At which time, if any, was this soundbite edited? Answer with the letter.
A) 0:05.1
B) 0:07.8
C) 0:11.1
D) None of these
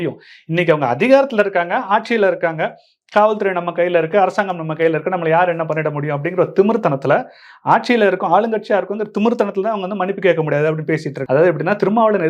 C